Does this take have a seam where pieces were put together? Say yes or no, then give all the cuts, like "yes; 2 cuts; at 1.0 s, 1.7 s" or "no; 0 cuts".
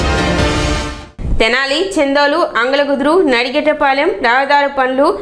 yes; 1 cut; at 1.0 s